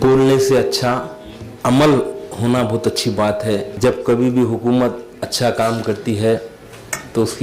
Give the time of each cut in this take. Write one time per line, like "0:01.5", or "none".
0:03.7